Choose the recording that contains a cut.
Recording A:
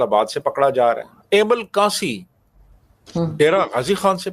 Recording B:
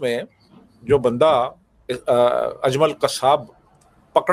A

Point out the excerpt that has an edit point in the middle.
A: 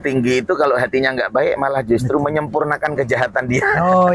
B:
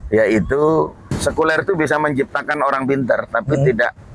B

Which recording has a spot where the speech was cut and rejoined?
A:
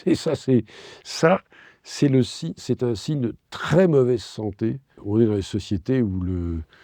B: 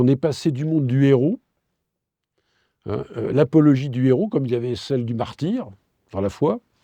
A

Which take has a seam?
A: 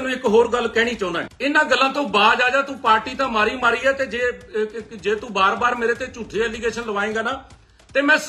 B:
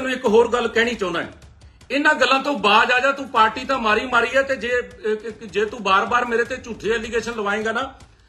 A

